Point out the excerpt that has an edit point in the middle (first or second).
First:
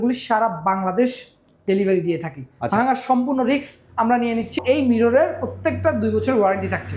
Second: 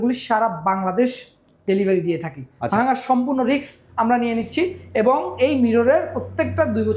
first